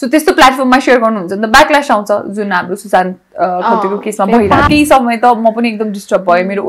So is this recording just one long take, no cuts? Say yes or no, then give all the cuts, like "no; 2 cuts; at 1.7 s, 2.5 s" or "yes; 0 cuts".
no; 1 cut; at 4.7 s